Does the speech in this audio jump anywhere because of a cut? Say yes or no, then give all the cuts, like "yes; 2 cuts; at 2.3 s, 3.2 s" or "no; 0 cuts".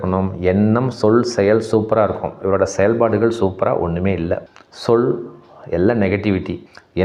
no; 0 cuts